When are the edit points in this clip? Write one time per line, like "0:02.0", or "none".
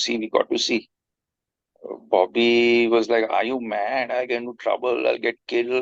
none